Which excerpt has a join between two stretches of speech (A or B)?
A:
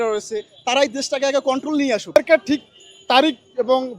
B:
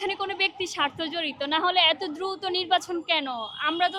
A